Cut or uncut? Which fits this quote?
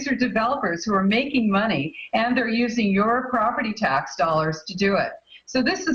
uncut